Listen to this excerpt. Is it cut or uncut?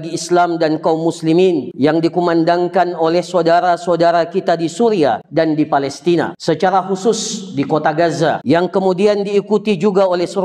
cut